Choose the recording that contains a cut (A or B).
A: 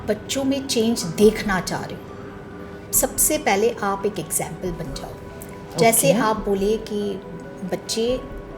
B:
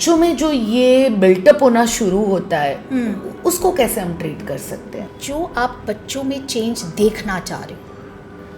B